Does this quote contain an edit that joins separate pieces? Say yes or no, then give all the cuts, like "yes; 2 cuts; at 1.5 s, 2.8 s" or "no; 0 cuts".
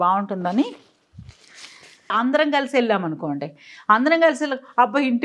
yes; 1 cut; at 2.1 s